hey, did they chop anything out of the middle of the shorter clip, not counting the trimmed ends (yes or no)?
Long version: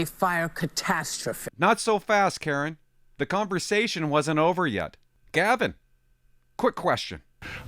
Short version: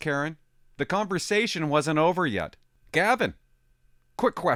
no